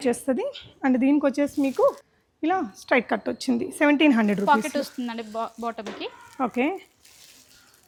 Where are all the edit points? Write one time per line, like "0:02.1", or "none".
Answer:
none